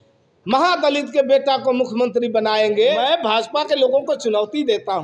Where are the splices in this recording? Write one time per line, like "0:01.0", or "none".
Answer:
0:03.0